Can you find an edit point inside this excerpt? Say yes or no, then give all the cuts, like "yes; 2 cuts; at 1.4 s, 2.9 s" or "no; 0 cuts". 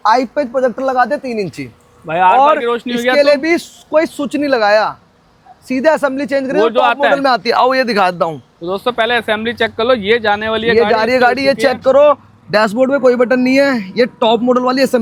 no; 0 cuts